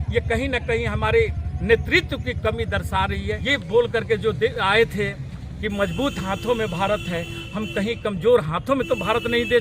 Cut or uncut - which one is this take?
cut